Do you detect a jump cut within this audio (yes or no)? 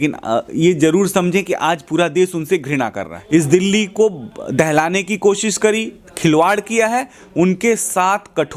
yes